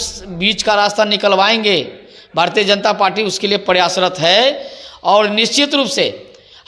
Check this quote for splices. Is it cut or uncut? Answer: uncut